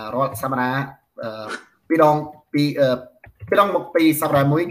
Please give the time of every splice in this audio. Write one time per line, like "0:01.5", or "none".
none